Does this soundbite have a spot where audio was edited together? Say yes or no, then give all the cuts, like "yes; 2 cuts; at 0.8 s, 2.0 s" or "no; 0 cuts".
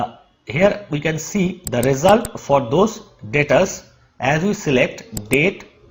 no; 0 cuts